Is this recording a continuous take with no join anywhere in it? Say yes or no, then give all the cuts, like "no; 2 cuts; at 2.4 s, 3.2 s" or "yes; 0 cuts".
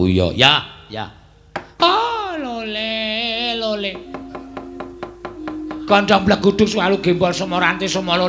no; 1 cut; at 1.7 s